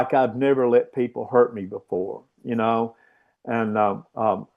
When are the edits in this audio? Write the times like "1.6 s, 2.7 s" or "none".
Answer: none